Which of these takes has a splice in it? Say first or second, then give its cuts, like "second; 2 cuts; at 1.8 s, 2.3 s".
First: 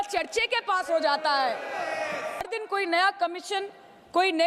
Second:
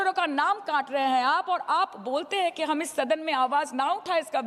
first; 1 cut; at 2.5 s